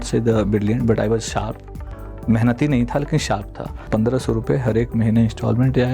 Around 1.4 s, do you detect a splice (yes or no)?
no